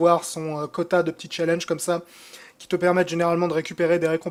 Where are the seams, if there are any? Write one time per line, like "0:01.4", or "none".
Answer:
none